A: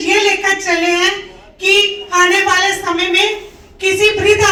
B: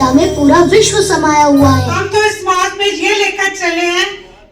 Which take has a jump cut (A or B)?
B